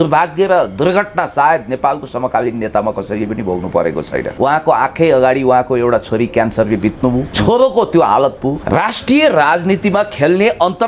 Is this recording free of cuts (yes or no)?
no